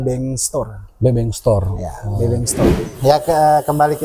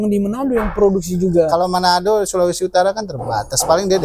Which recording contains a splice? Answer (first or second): first